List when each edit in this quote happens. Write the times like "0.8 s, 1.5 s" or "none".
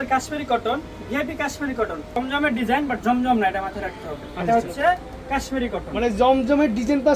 2.2 s